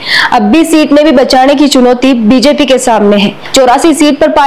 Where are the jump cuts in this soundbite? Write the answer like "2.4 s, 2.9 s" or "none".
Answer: 3.4 s